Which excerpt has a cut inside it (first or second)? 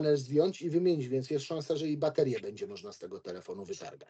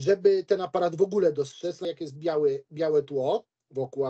second